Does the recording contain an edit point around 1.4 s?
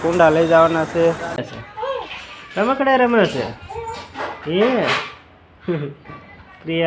yes; 1 cut; at 1.4 s

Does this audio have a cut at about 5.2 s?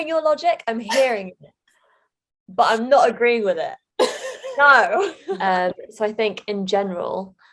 yes; 1 cut; at 5.2 s

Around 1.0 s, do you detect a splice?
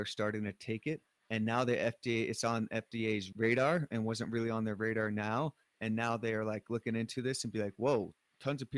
no; 0 cuts

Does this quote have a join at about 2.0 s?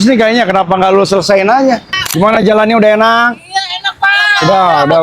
yes; 1 cut; at 2.0 s

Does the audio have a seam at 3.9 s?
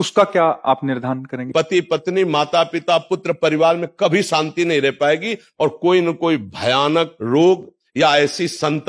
no; 2 cuts; at 1.5 s, 7.2 s

